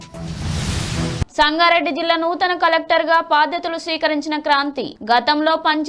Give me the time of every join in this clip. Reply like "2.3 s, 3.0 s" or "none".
none